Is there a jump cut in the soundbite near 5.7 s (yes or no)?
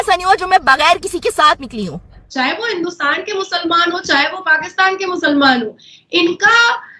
no